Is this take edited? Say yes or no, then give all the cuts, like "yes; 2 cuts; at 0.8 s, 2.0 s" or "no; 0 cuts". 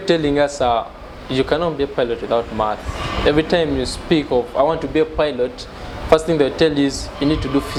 no; 0 cuts